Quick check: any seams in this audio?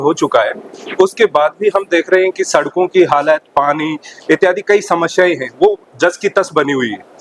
no; 0 cuts

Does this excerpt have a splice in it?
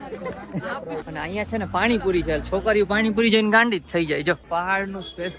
yes; 2 cuts; at 1.0 s, 4.4 s

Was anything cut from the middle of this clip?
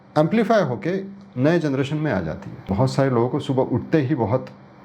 yes; 1 cut; at 2.7 s

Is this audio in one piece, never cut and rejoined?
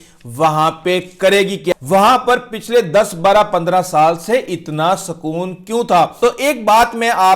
no; 2 cuts; at 1.7 s, 6.1 s

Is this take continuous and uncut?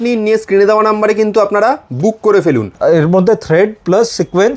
no; 1 cut; at 2.7 s

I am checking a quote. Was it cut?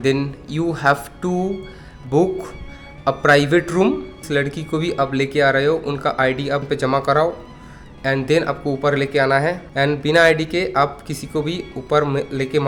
no; 0 cuts

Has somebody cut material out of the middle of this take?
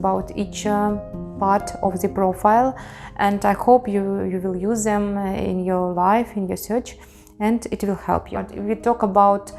yes; 1 cut; at 8.5 s

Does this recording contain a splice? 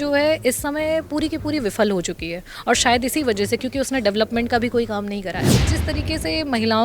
yes; 1 cut; at 5.8 s

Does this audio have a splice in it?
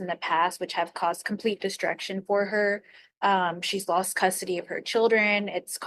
no; 0 cuts

